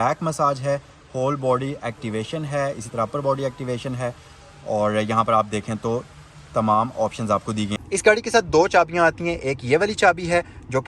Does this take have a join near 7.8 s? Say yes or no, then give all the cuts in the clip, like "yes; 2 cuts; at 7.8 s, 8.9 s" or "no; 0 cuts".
yes; 1 cut; at 7.8 s